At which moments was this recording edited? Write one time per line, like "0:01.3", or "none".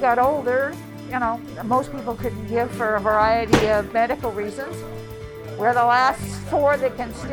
0:01.6